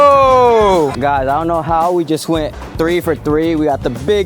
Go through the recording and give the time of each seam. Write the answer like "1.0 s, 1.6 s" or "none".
1.0 s